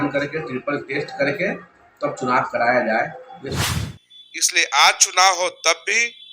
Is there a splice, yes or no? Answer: yes